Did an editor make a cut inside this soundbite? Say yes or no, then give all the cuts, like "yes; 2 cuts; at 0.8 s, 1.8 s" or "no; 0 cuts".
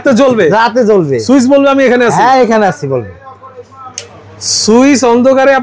no; 0 cuts